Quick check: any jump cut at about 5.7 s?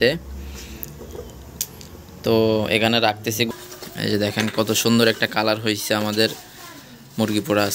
no; 1 cut; at 3.4 s

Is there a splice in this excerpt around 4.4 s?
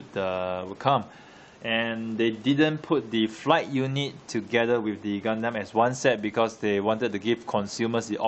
no; 1 cut; at 6.2 s

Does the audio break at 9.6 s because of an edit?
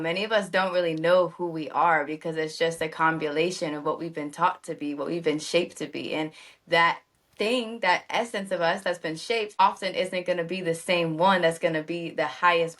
yes; 1 cut; at 9.6 s

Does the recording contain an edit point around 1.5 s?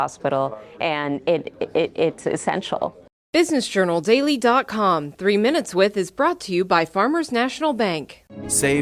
no; 1 cut; at 3.0 s

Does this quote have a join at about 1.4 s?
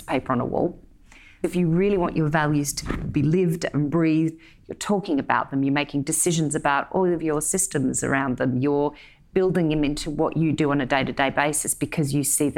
yes; 1 cut; at 1.4 s

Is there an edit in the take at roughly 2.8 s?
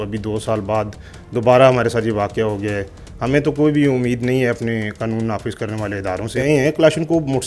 no; 1 cut; at 6.4 s

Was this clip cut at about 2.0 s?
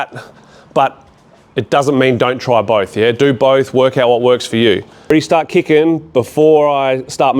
no; 1 cut; at 5.1 s

